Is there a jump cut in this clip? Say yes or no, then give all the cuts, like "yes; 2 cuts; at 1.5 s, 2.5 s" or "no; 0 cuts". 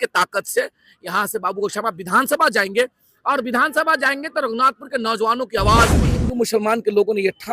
yes; 1 cut; at 6.2 s